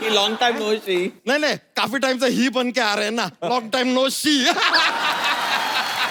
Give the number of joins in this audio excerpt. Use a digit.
0